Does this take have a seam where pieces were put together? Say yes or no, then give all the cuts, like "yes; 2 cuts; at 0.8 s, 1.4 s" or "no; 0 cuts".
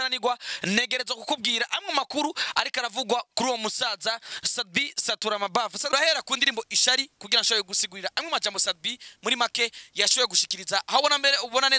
yes; 1 cut; at 5.9 s